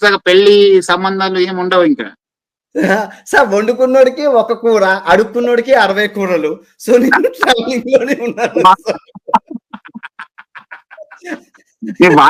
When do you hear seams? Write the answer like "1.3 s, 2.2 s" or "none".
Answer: none